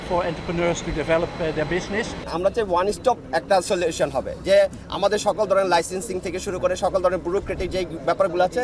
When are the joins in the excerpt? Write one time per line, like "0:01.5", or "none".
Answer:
none